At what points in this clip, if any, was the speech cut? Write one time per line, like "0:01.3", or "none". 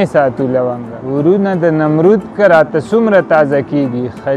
0:00.9

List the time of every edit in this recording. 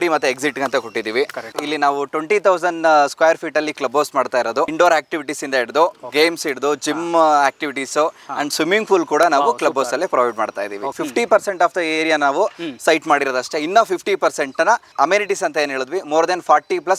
0:01.5
0:04.7
0:10.9

